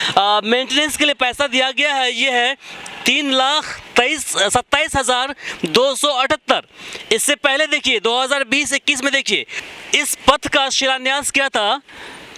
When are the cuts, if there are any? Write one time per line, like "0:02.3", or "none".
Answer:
0:09.6